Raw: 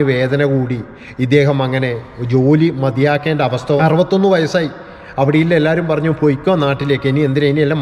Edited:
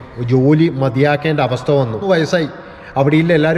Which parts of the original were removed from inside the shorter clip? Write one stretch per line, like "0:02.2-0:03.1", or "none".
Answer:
0:03.8-0:04.0

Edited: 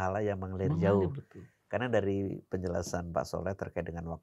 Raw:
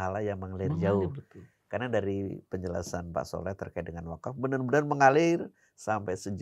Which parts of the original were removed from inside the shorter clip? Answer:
none

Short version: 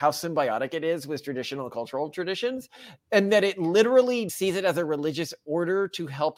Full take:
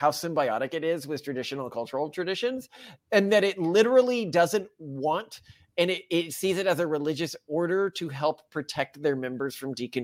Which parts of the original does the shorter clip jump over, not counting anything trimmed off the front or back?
0:04.3-0:06.3

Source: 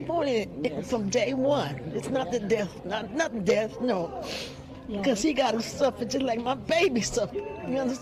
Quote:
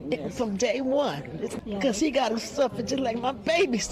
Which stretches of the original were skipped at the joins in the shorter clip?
0:02.0-0:04.7

